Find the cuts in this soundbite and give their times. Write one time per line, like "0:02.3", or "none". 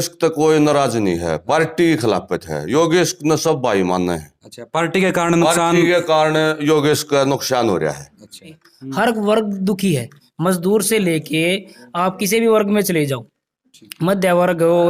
none